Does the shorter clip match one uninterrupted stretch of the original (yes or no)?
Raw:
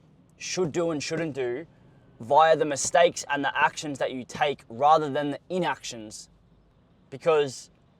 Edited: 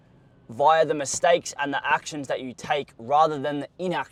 yes